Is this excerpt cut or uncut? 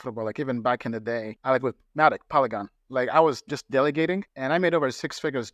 cut